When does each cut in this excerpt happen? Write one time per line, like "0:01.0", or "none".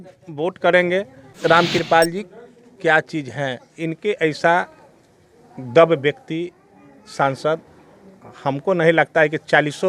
0:01.3